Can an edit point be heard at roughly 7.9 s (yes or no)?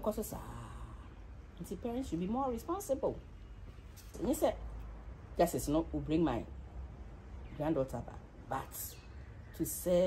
no